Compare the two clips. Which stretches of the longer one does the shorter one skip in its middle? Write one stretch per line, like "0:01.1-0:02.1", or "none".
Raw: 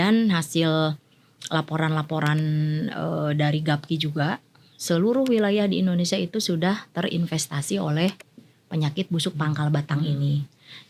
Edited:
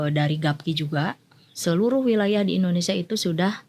none